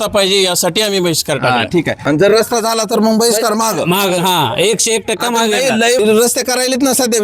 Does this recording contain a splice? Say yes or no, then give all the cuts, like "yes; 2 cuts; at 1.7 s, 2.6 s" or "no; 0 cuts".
yes; 2 cuts; at 2.0 s, 6.0 s